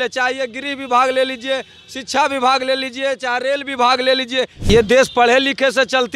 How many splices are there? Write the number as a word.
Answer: one